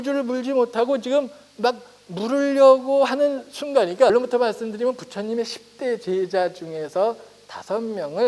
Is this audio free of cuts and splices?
no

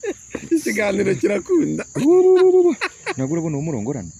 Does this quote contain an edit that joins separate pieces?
no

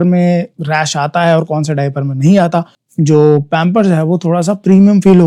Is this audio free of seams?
no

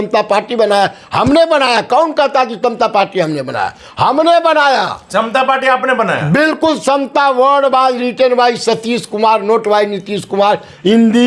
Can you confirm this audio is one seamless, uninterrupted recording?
yes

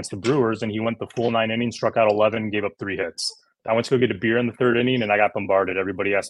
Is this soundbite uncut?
no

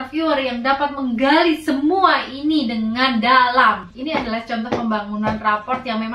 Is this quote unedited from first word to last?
no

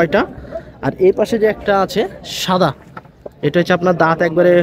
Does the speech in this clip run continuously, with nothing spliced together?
yes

